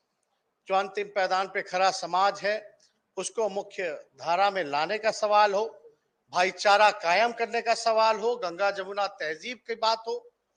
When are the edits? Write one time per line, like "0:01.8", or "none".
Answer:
none

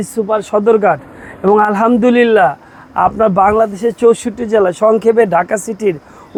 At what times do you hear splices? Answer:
none

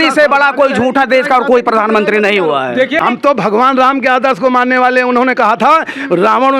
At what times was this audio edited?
0:03.0

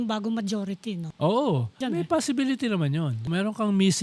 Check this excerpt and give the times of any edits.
0:01.1
0:01.8
0:03.3

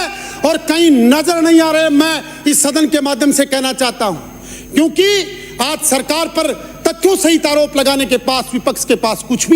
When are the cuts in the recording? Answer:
none

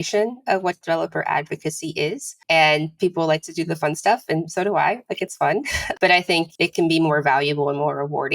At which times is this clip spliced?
0:02.3
0:05.8
0:06.5

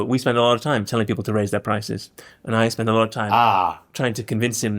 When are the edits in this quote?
none

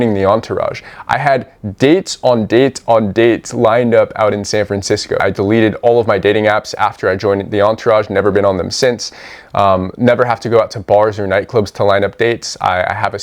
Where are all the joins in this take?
0:05.2

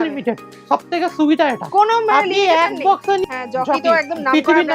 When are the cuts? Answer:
0:03.2

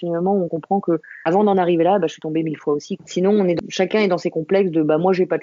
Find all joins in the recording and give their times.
0:03.0
0:03.6

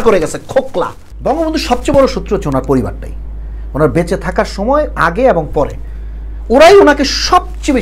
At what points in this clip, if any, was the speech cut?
0:01.0

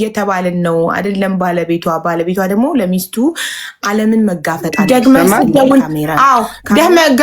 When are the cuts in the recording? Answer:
0:04.7

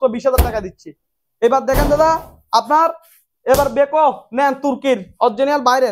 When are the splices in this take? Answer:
none

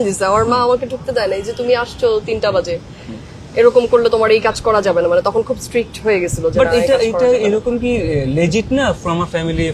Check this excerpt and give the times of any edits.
none

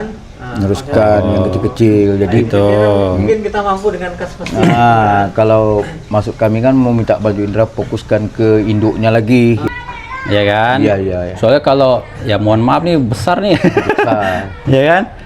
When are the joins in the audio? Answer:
0:09.6

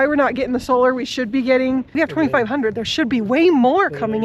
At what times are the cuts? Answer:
0:01.9

